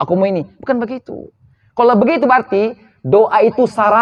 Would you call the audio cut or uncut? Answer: uncut